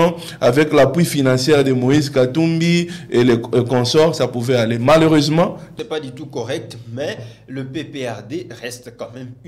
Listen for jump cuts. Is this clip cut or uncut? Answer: cut